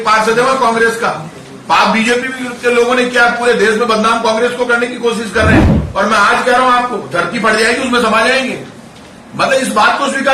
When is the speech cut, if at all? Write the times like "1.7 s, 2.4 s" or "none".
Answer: 5.8 s

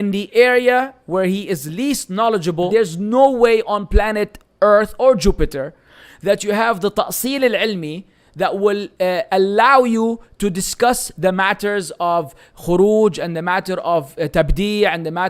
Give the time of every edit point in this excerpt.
2.7 s

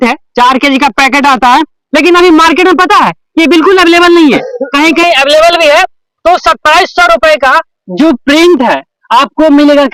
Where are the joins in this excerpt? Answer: none

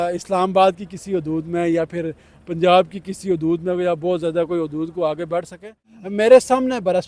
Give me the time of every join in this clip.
5.9 s

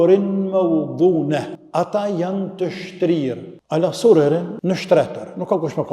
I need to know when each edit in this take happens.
1.6 s, 3.5 s, 4.5 s

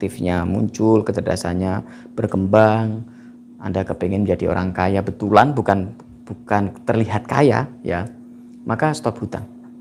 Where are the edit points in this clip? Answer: none

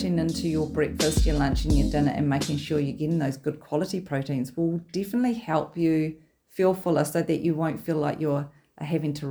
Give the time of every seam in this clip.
none

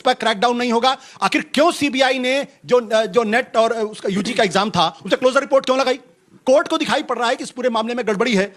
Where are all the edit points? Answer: none

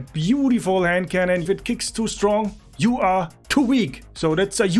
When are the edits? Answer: 1.4 s

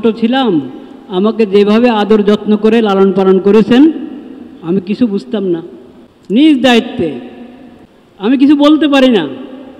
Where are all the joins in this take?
6.3 s, 8.4 s

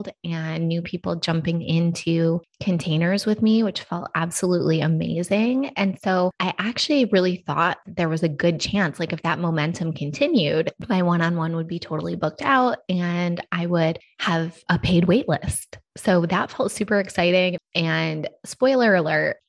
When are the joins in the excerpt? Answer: 10.7 s, 17.6 s

